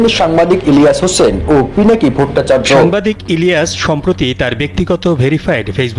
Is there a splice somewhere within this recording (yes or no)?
yes